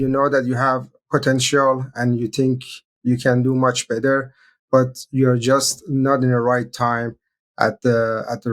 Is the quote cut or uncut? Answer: cut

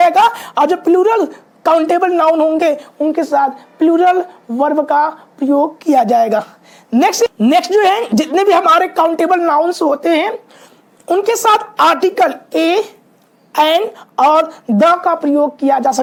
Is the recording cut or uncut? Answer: uncut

